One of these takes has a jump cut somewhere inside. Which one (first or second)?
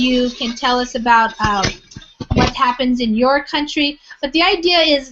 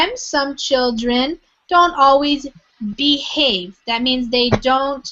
first